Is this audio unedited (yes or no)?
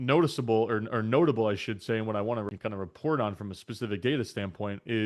no